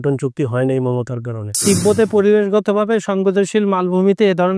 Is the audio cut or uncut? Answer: cut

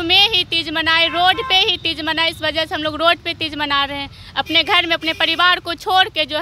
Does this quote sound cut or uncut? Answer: uncut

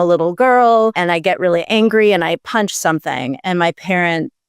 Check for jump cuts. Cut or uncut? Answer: cut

